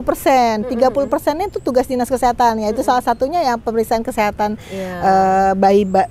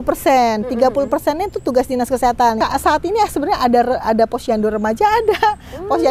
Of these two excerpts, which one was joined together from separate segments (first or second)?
second